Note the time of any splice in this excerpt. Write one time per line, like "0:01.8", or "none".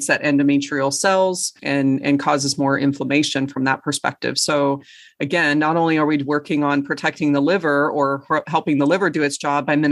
0:01.6